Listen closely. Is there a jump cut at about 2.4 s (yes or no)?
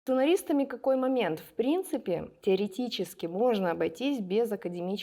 no